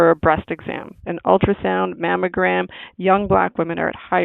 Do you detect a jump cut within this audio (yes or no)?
yes